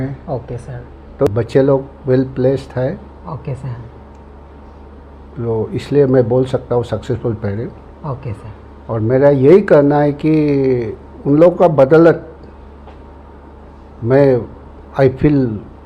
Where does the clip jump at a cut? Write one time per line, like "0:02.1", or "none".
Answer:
0:01.3